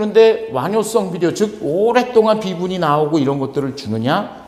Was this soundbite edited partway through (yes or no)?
no